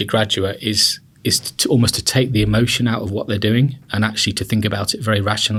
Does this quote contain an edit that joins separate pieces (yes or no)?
no